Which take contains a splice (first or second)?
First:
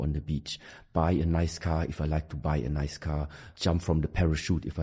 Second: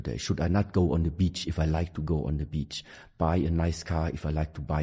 first